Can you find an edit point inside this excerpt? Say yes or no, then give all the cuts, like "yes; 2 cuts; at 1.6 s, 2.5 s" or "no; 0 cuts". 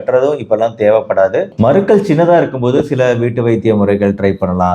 yes; 1 cut; at 1.5 s